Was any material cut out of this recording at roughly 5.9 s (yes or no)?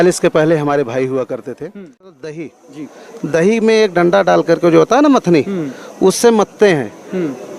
no